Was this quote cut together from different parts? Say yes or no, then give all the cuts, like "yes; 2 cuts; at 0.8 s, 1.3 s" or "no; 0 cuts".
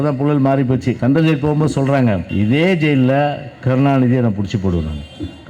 yes; 2 cuts; at 0.9 s, 2.3 s